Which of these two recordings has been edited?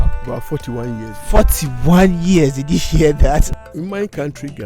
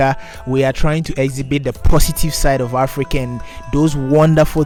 first; 1 cut; at 3.5 s

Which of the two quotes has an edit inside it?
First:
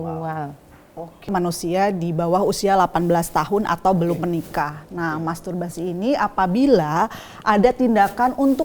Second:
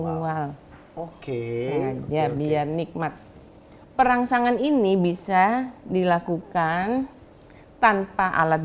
first; 1 cut; at 1.3 s

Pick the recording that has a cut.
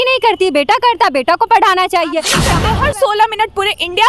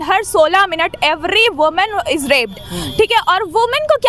first; 1 cut; at 2.4 s

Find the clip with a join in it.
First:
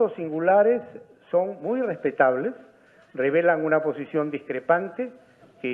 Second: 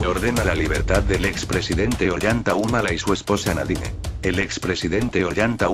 first; 1 cut; at 2.2 s

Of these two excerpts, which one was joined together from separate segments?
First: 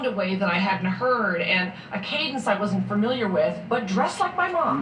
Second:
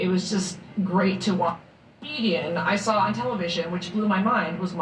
second; 2 cuts; at 1.5 s, 3.0 s

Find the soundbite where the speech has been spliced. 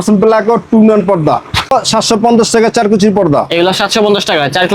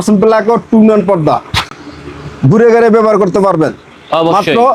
first; 1 cut; at 1.7 s

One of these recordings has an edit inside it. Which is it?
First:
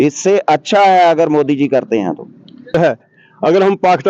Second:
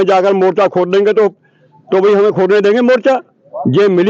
first; 1 cut; at 2.7 s

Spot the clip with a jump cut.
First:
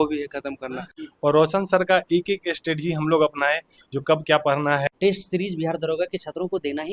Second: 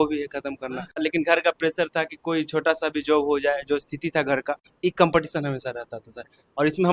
first; 2 cuts; at 0.9 s, 4.9 s

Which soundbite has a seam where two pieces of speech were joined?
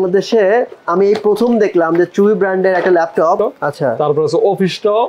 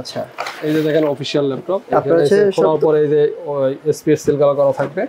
first; 1 cut; at 3.4 s

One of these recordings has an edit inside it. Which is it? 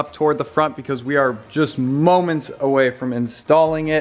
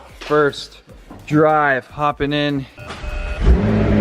second; 1 cut; at 2.8 s

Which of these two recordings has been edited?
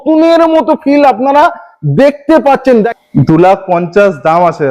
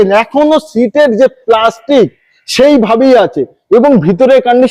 first; 1 cut; at 2.9 s

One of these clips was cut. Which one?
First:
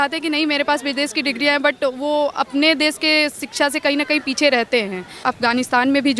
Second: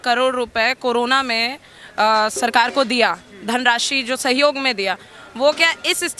first; 1 cut; at 5.2 s

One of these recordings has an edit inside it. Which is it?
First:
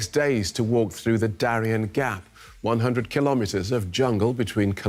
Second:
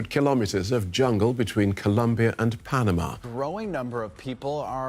second; 1 cut; at 3.1 s

